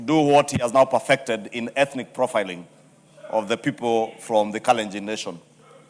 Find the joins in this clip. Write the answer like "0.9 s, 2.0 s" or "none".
none